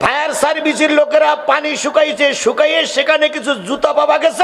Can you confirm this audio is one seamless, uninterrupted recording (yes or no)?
yes